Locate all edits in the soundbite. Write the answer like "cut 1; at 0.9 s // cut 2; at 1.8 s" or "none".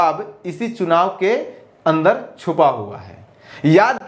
none